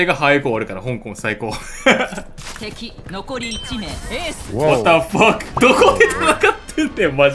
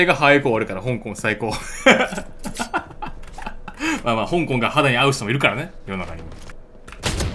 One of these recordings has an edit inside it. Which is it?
first; 2 cuts; at 2.3 s, 5.5 s

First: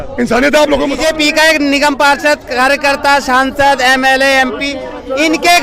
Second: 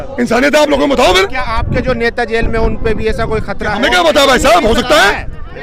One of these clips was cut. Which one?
first; 1 cut; at 0.9 s

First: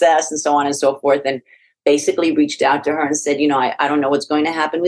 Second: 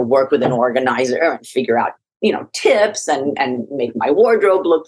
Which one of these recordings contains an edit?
second; 1 cut; at 2.0 s

